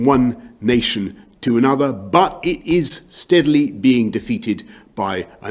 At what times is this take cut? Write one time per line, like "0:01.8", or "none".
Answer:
0:00.9
0:02.0